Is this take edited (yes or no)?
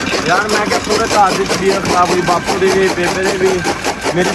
no